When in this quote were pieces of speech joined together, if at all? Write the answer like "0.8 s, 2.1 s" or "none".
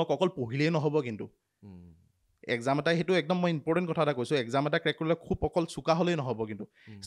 none